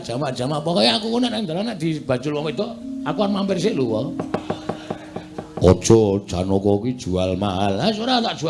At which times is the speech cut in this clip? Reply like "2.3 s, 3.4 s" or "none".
none